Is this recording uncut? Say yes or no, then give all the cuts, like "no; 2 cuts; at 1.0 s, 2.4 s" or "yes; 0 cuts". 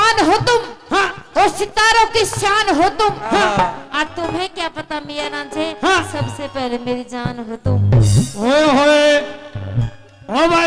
yes; 0 cuts